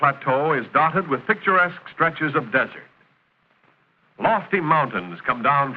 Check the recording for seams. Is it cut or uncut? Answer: uncut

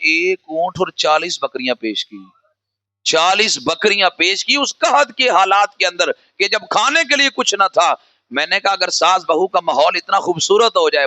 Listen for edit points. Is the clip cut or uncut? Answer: uncut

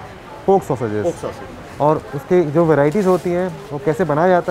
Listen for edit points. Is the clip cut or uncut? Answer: uncut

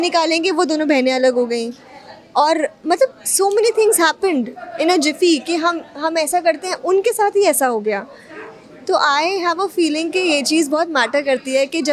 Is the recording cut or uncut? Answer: uncut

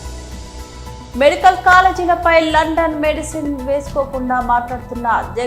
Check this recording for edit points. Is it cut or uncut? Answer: uncut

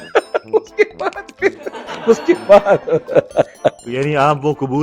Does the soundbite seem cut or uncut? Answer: uncut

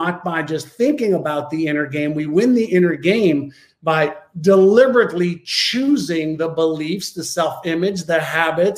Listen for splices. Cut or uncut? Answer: uncut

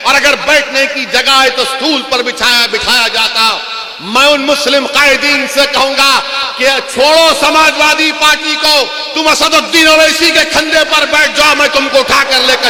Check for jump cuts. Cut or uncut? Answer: uncut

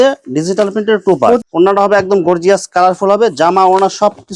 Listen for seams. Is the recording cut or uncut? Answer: cut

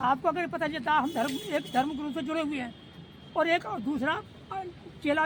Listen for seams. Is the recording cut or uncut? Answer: uncut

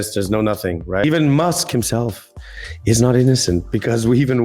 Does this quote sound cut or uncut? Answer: cut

